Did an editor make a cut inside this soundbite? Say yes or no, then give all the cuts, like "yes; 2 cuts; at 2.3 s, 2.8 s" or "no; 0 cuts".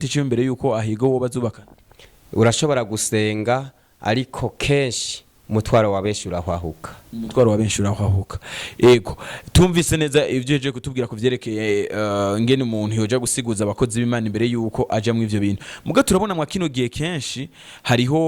no; 0 cuts